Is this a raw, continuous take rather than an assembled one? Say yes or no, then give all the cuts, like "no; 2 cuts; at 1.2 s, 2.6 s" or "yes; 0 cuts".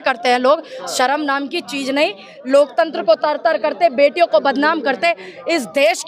yes; 0 cuts